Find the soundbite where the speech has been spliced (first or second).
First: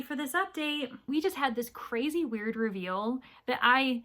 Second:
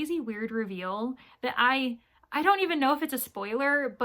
first